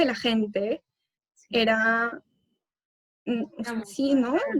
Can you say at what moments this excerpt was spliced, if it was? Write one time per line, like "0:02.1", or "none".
none